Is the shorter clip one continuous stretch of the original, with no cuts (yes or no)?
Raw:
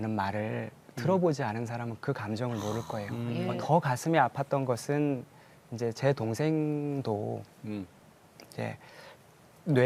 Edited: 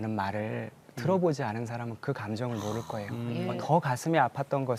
yes